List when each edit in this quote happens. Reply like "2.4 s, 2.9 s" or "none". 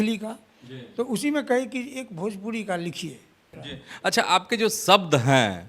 3.5 s